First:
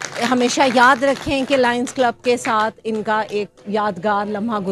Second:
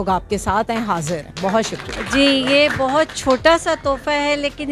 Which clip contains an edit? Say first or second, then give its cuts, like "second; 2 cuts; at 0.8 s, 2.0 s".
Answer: second; 1 cut; at 1.9 s